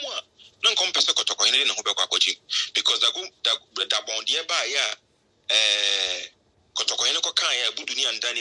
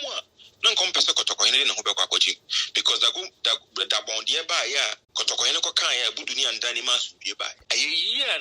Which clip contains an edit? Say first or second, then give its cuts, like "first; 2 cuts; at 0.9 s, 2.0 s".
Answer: second; 2 cuts; at 5.0 s, 7.6 s